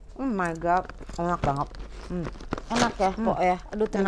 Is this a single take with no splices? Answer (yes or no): yes